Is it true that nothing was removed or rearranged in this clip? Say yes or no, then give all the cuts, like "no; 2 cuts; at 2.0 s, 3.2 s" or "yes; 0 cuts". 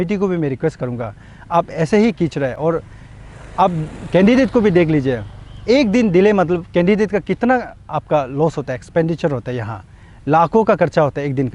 yes; 0 cuts